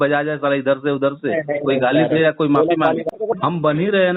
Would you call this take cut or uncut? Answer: cut